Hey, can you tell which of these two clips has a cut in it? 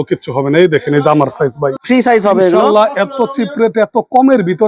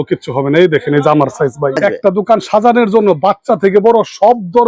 second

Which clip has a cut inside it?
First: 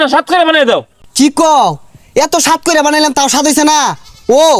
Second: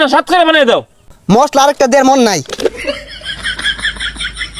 second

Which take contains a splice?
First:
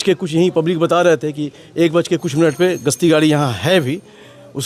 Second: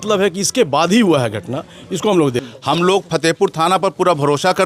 second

